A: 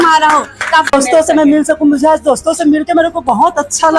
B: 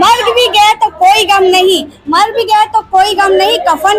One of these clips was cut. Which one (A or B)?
A